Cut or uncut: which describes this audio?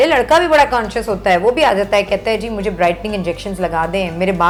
uncut